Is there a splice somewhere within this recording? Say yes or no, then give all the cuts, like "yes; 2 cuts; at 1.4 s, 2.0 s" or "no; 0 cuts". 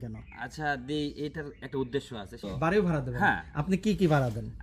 yes; 1 cut; at 2.4 s